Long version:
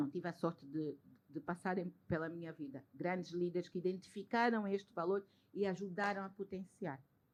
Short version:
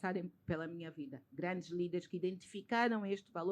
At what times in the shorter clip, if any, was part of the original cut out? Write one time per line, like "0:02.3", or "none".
none